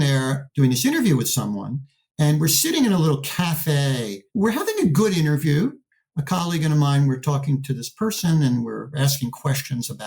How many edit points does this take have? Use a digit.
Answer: 1